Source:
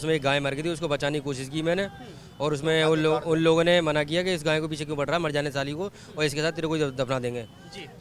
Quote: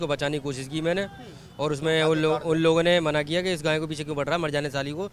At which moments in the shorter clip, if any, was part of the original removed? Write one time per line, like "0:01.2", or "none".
none